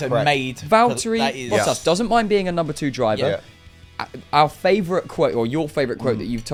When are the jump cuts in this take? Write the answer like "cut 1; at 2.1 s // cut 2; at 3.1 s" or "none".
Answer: none